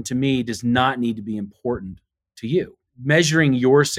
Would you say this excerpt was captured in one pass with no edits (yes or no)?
no